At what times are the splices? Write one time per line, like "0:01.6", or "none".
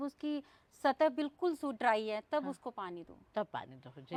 none